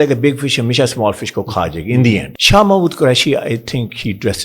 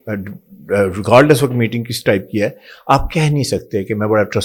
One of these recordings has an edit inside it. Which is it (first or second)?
first